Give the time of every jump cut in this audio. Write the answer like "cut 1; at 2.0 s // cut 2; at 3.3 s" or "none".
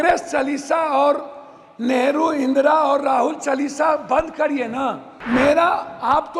cut 1; at 5.1 s

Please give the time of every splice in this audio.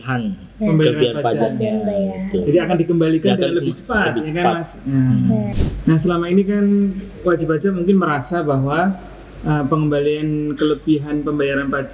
cut 1; at 5.5 s

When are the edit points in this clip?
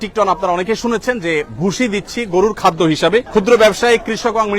cut 1; at 3.3 s

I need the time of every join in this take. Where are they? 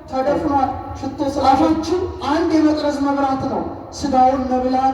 cut 1; at 1.5 s

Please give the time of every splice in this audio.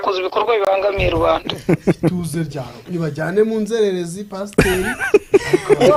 none

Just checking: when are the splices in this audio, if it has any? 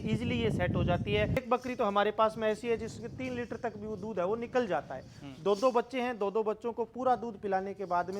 cut 1; at 1.4 s

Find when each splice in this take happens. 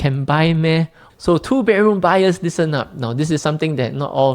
cut 1; at 1.0 s

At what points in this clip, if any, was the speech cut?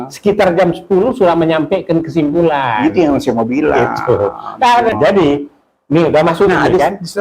cut 1; at 4.9 s

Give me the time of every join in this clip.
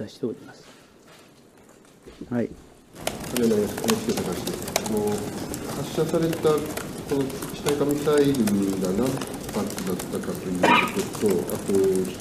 cut 1; at 3.1 s

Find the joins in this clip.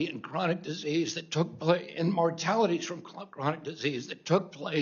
none

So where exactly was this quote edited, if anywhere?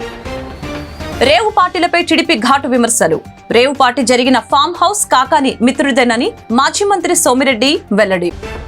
cut 1; at 1.1 s

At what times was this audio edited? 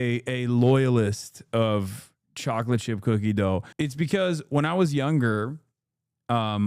cut 1; at 3.7 s

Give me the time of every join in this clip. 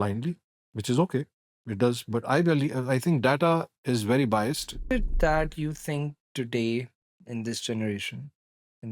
cut 1; at 4.8 s

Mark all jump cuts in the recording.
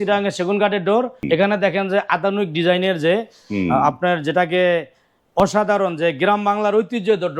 cut 1; at 1.2 s

